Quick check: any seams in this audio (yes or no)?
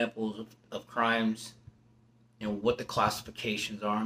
no